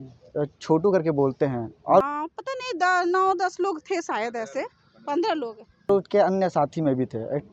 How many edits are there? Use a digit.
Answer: 2